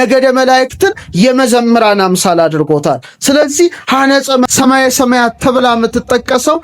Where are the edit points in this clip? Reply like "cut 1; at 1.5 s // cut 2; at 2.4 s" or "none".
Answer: cut 1; at 4.5 s